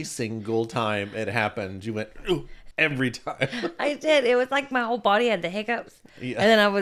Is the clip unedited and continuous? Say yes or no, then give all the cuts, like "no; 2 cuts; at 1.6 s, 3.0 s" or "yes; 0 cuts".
no; 1 cut; at 2.6 s